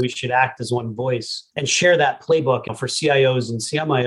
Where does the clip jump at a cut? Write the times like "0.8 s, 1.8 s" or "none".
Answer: 1.4 s, 2.6 s